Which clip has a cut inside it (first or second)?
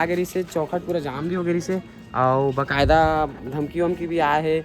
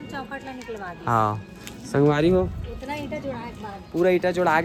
first